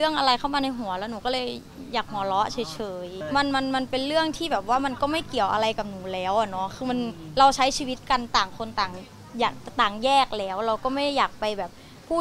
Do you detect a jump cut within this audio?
yes; 1 cut; at 3.2 s

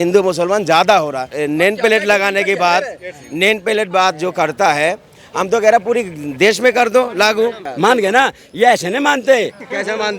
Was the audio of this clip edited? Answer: yes; 2 cuts; at 1.3 s, 7.6 s

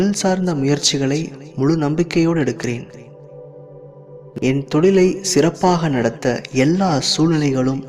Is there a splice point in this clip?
yes; 2 cuts; at 3.0 s, 4.3 s

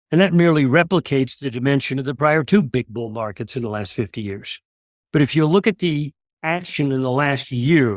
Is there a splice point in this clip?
no; 0 cuts

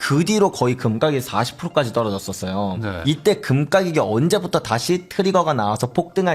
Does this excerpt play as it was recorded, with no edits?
no; 1 cut; at 3.0 s

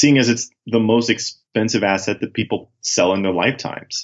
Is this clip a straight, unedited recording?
yes; 0 cuts

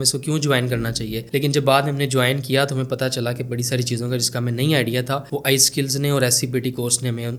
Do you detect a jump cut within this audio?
no; 0 cuts

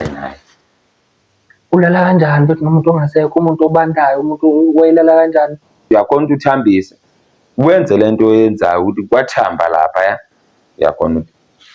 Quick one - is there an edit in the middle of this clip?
yes; 1 cut; at 5.8 s

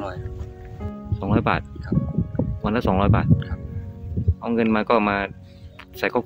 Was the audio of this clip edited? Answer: no; 0 cuts

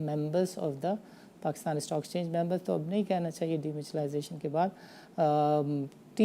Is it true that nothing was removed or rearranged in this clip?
yes; 0 cuts

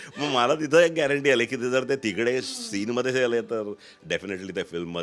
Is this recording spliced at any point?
no; 0 cuts

